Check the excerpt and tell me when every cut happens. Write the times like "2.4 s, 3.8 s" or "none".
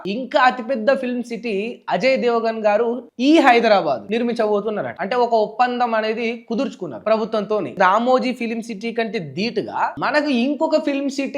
4.9 s, 7.7 s